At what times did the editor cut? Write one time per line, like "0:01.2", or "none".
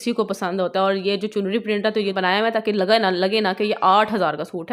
0:02.3